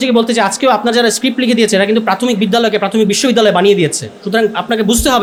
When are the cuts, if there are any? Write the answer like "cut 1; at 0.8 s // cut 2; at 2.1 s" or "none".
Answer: none